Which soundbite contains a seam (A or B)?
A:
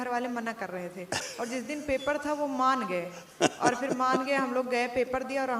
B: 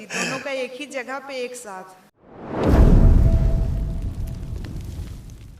B